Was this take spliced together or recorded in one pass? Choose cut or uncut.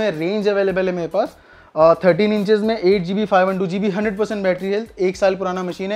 uncut